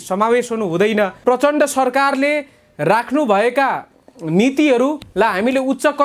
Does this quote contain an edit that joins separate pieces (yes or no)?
yes